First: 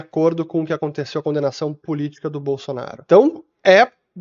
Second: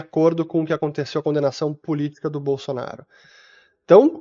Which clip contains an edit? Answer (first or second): first